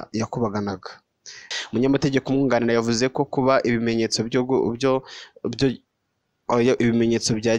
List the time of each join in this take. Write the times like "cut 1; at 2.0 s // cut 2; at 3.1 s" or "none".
cut 1; at 1.4 s